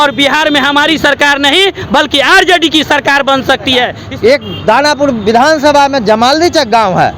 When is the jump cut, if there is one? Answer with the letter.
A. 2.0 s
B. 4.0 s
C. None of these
B